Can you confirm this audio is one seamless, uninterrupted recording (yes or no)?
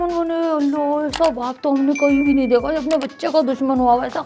yes